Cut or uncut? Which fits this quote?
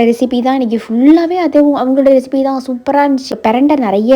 cut